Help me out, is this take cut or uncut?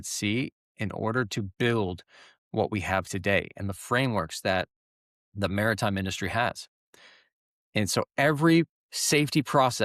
uncut